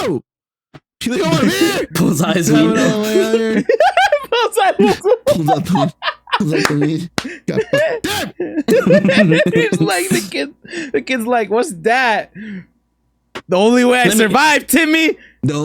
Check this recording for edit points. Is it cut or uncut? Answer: cut